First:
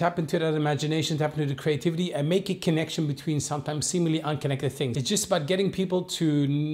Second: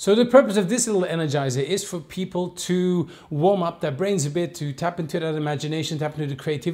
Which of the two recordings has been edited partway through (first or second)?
first